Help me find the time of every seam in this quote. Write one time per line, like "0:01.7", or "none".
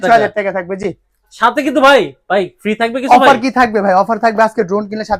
0:01.3